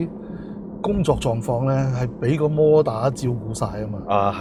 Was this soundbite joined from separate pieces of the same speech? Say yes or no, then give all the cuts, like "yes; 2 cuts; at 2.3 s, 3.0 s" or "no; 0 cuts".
no; 0 cuts